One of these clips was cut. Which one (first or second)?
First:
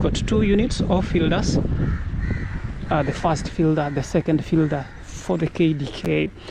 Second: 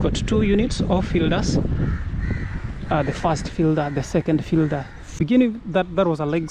second